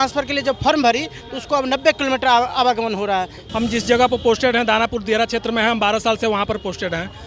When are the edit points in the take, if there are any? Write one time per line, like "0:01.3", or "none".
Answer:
0:03.4